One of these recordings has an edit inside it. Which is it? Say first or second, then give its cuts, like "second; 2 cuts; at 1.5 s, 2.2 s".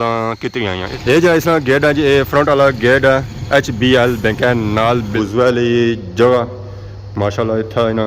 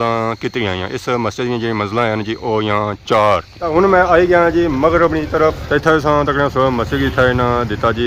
first; 2 cuts; at 0.9 s, 5.1 s